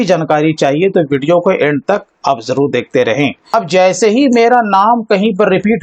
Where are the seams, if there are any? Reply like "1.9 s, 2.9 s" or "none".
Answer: 3.4 s